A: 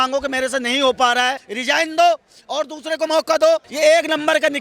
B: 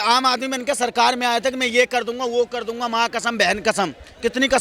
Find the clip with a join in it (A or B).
A